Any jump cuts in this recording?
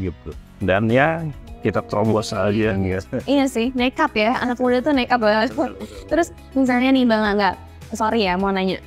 no; 0 cuts

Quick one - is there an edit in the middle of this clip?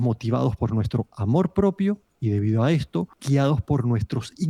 yes; 1 cut; at 3.2 s

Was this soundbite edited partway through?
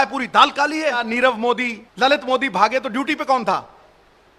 yes; 2 cuts; at 1.1 s, 1.8 s

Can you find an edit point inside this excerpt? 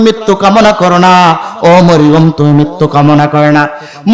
no; 0 cuts

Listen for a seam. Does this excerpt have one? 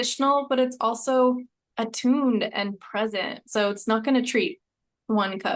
no; 0 cuts

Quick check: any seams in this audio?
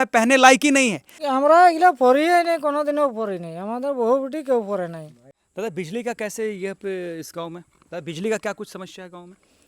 no; 0 cuts

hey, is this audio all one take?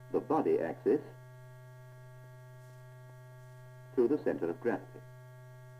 no; 1 cut; at 2.8 s

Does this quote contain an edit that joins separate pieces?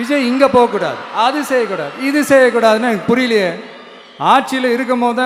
no; 0 cuts

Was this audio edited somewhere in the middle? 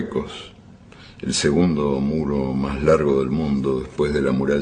yes; 1 cut; at 3.2 s

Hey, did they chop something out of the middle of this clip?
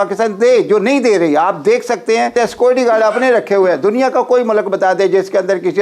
yes; 1 cut; at 2.3 s

